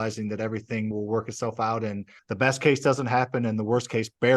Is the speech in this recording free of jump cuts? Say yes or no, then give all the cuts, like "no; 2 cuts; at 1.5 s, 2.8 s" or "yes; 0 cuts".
no; 2 cuts; at 0.9 s, 2.1 s